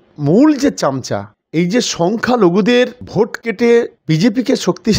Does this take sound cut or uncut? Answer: uncut